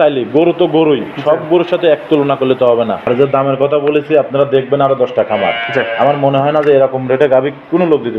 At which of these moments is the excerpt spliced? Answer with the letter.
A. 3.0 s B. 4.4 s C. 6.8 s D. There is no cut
A